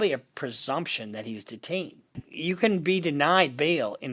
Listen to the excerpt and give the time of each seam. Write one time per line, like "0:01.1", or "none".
none